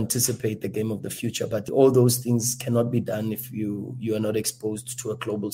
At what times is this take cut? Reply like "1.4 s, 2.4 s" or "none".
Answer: none